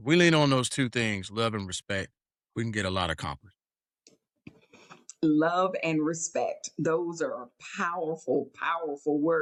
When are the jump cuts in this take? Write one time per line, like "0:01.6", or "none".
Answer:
none

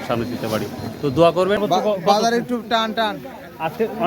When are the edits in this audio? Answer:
0:01.6

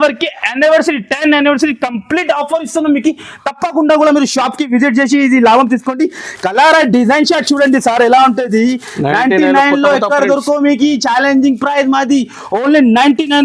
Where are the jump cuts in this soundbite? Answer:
none

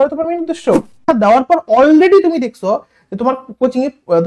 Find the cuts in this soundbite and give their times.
0:01.0

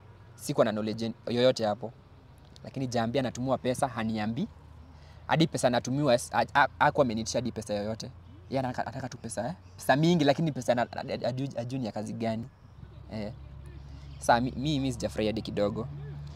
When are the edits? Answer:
none

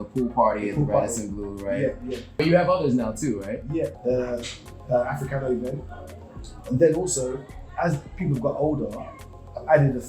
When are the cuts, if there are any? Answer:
0:04.0

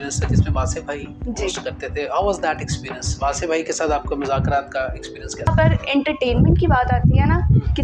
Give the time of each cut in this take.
0:05.5

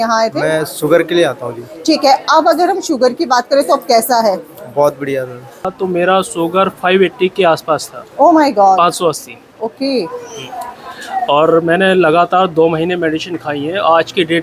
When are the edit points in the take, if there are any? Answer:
0:05.6

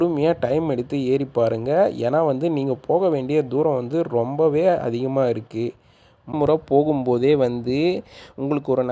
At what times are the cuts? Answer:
0:06.3

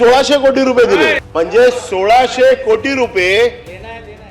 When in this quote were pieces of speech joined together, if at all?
0:01.2

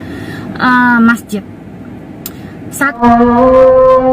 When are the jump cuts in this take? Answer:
0:03.0

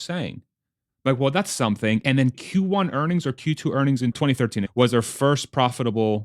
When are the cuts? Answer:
0:02.4
0:04.2

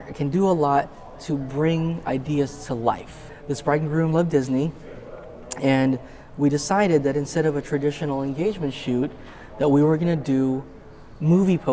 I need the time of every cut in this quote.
0:03.3

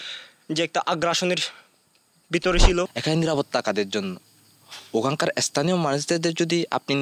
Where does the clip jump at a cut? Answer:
0:02.9

